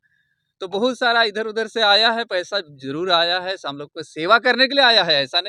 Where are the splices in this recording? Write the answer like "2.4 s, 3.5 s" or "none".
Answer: none